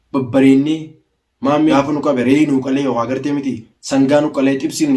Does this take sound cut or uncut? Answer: cut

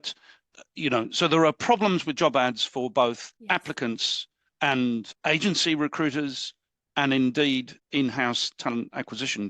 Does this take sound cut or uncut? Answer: cut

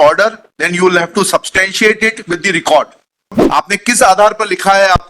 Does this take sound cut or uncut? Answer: cut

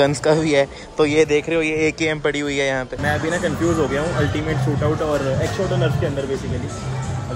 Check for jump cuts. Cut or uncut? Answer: uncut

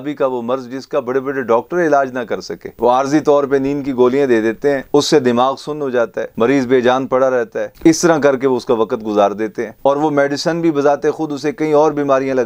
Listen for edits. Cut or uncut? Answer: uncut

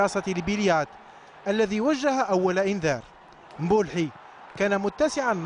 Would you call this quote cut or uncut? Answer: uncut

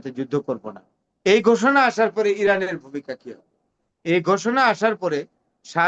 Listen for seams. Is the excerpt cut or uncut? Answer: uncut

